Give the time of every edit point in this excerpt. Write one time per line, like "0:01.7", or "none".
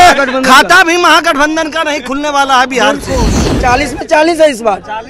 0:03.4